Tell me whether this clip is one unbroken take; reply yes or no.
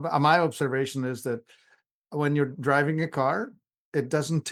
yes